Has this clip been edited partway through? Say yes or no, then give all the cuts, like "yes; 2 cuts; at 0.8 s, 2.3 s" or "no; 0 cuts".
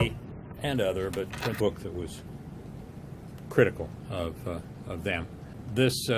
no; 0 cuts